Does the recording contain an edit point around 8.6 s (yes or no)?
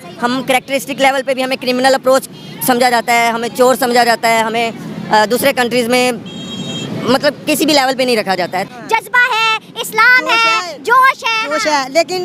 yes